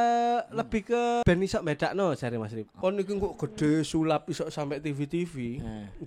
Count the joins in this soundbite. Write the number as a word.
two